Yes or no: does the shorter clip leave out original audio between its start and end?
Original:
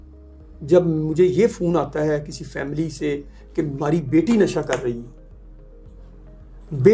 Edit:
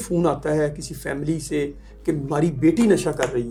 no